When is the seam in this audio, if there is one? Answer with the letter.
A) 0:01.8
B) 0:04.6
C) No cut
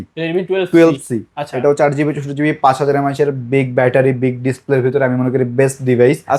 C